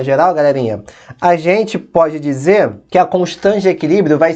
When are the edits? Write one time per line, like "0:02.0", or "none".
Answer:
0:02.8